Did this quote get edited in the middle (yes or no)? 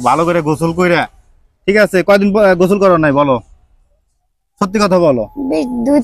no